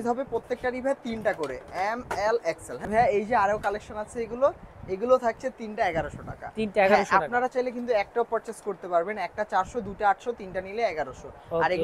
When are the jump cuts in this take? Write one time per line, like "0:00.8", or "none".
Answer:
none

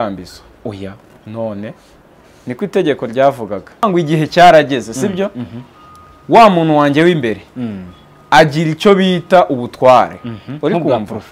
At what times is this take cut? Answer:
0:03.8

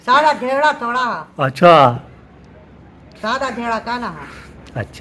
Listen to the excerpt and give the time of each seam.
none

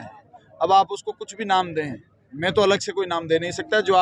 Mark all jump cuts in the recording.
none

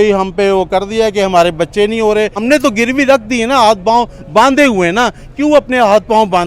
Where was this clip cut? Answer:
0:02.4

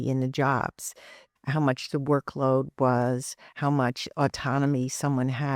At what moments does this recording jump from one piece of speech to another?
none

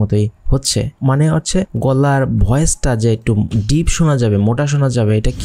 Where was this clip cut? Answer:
none

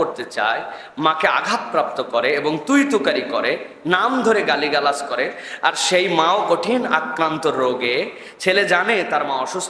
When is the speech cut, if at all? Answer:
none

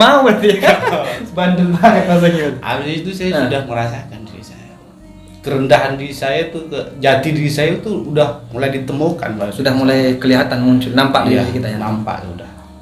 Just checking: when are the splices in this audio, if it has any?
none

